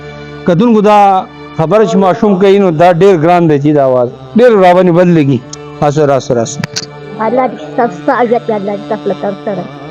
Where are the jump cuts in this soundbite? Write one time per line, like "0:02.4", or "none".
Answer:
0:07.0